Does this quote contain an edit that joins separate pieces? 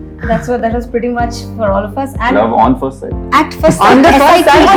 no; 0 cuts

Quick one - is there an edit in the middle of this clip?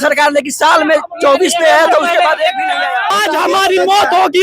yes; 1 cut; at 3.1 s

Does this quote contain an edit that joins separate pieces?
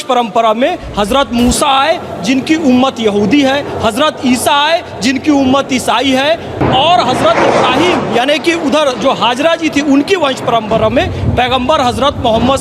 no; 0 cuts

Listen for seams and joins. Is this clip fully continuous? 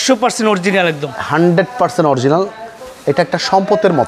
yes; 0 cuts

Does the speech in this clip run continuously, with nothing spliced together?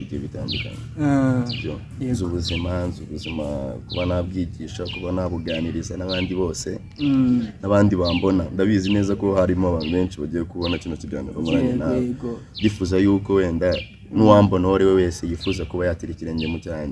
yes; 0 cuts

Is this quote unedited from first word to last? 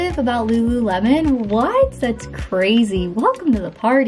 yes; 0 cuts

